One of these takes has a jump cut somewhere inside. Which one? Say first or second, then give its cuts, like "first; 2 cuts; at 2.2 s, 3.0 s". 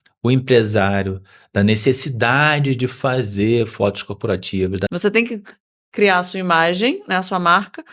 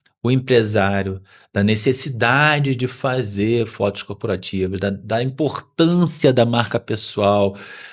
first; 1 cut; at 4.8 s